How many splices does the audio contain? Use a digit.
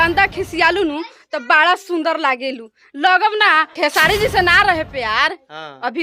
1